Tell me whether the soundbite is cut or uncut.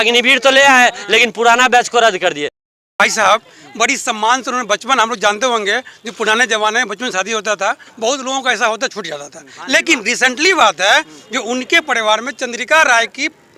cut